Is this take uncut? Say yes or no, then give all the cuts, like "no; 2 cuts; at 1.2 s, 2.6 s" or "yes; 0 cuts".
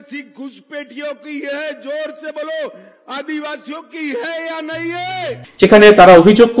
yes; 0 cuts